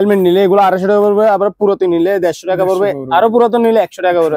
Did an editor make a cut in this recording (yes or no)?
no